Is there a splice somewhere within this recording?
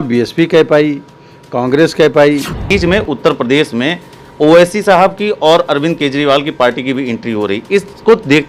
yes; 1 cut; at 2.7 s

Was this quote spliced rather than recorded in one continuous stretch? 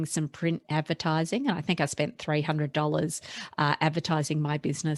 no; 0 cuts

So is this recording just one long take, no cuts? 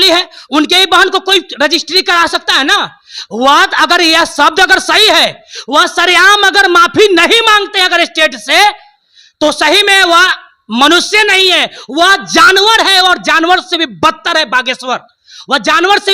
yes; 0 cuts

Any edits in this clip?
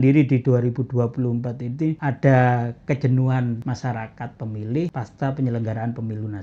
yes; 3 cuts; at 2.0 s, 3.6 s, 4.9 s

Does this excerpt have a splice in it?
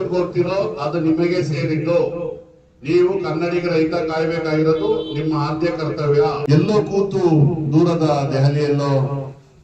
yes; 1 cut; at 6.4 s

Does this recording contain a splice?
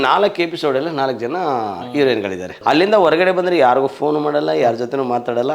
yes; 1 cut; at 2.5 s

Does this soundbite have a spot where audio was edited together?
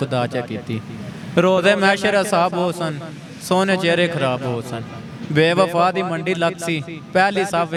no; 0 cuts

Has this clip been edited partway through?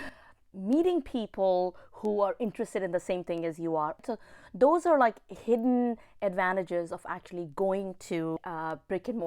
yes; 2 cuts; at 4.0 s, 8.4 s

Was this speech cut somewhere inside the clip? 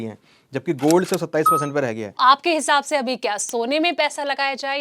yes; 1 cut; at 2.2 s

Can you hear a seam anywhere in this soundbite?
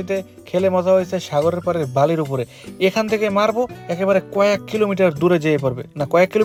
no; 0 cuts

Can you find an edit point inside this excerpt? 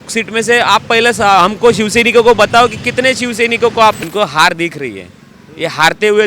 yes; 1 cut; at 4.0 s

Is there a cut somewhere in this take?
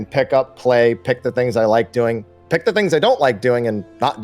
no; 0 cuts

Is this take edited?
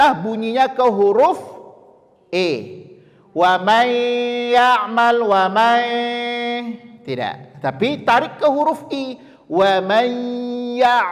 no; 0 cuts

